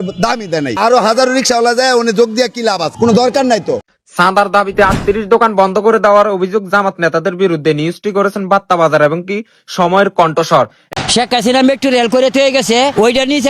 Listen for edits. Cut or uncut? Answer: cut